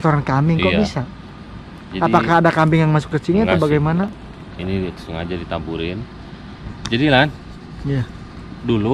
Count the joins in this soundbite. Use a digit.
0